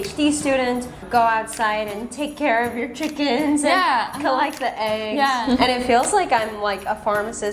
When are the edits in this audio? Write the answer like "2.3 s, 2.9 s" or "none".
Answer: 1.0 s, 5.4 s